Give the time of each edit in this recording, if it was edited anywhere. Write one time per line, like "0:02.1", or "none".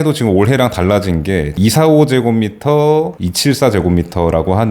0:01.5